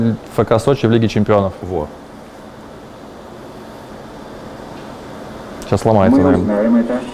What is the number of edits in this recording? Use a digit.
0